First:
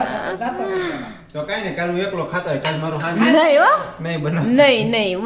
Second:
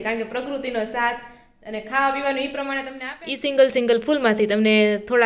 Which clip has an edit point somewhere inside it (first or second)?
second